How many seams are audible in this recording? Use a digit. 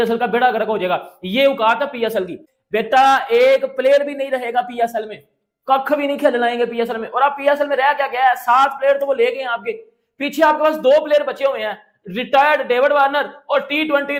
0